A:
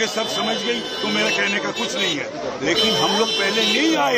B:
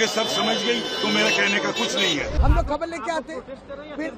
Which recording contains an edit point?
B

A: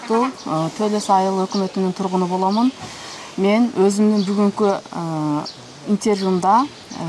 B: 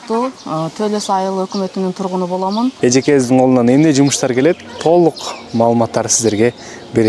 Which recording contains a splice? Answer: B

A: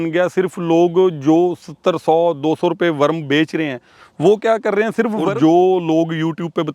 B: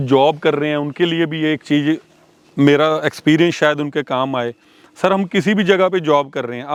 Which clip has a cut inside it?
A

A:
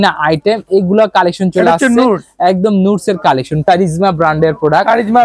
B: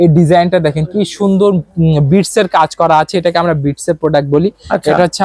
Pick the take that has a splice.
A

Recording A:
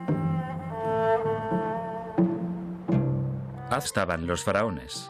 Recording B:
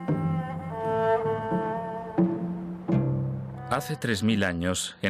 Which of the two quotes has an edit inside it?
B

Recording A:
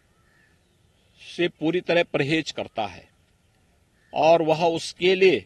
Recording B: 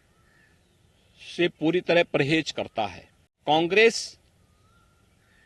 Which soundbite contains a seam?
B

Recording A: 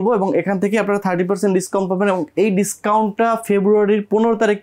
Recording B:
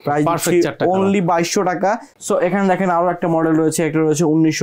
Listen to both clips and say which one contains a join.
B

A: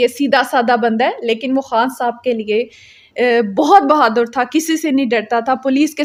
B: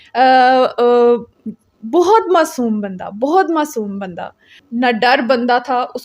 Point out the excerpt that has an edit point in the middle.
B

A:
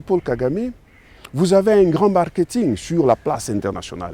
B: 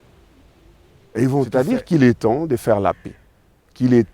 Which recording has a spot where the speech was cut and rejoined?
B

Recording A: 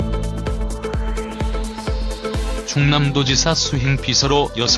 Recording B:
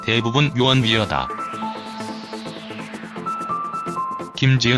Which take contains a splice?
B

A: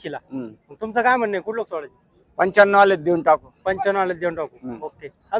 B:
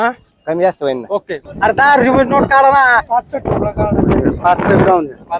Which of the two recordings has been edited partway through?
B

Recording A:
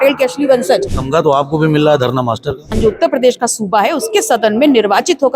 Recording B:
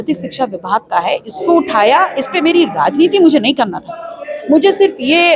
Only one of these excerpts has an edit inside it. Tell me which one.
A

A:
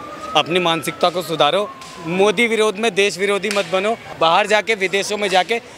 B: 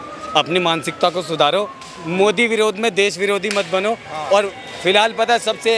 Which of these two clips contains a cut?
A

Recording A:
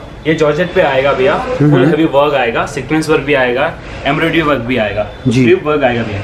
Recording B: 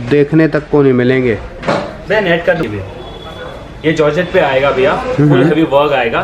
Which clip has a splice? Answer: B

